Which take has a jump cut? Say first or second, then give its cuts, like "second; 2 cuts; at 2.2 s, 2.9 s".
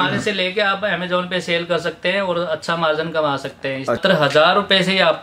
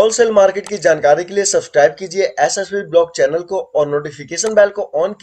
first; 1 cut; at 4.0 s